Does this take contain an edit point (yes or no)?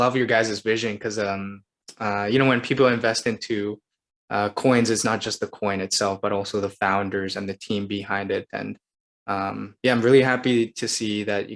no